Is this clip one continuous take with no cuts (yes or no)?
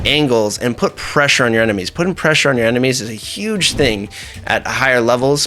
yes